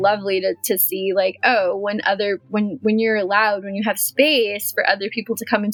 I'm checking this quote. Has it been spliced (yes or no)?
no